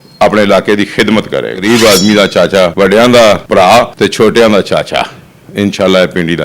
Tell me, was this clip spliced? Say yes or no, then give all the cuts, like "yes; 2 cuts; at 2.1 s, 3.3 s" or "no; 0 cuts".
yes; 3 cuts; at 1.6 s, 2.7 s, 3.8 s